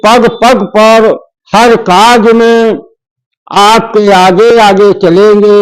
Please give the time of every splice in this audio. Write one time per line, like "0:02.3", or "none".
0:01.3